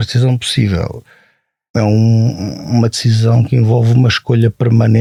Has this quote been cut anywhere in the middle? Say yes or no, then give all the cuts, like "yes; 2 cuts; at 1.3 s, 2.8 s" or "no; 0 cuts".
no; 0 cuts